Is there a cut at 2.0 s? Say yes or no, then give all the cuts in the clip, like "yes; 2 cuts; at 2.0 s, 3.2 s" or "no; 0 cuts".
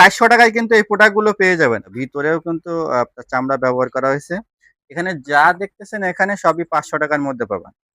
yes; 1 cut; at 2.0 s